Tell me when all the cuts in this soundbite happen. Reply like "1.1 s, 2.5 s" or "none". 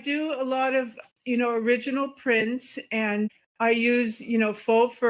3.4 s